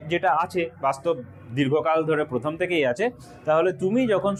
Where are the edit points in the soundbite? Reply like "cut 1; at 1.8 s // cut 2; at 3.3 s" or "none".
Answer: none